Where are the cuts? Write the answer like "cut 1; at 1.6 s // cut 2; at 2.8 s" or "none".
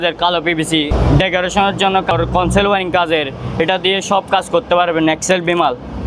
cut 1; at 0.9 s // cut 2; at 2.1 s